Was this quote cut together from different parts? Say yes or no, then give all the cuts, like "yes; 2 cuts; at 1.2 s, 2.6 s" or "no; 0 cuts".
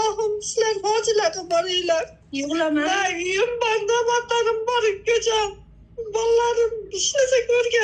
no; 0 cuts